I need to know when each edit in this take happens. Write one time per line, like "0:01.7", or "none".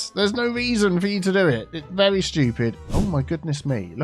0:02.8